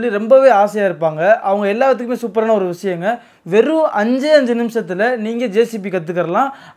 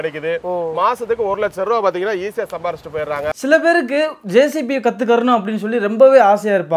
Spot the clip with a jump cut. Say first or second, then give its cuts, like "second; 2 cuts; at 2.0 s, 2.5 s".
second; 1 cut; at 3.4 s